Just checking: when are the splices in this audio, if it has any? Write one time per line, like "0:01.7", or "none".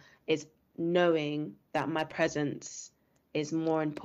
none